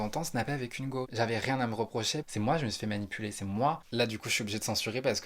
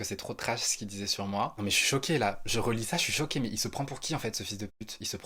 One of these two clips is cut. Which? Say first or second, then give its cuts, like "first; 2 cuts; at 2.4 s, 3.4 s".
first; 3 cuts; at 1.1 s, 2.3 s, 3.8 s